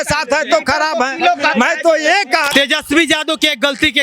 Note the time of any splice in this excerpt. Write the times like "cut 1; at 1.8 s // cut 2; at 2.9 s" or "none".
cut 1; at 2.5 s